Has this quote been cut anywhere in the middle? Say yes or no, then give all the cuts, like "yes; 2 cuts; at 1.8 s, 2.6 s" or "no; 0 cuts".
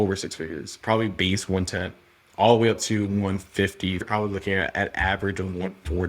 yes; 1 cut; at 4.0 s